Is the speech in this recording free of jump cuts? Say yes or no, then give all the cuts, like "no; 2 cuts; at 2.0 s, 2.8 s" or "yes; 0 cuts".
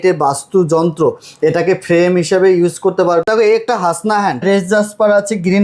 no; 2 cuts; at 3.2 s, 4.4 s